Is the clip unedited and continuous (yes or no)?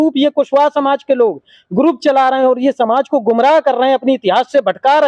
yes